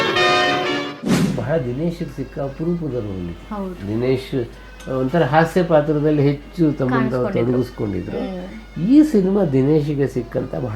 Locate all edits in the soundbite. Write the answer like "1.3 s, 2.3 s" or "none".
1.0 s